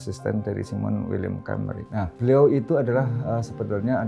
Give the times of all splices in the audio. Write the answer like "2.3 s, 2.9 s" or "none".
none